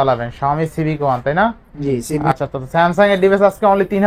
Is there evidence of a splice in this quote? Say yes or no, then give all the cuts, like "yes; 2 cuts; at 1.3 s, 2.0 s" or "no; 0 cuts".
yes; 1 cut; at 2.3 s